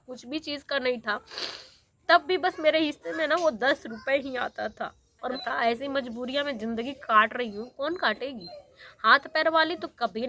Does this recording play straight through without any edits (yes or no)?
no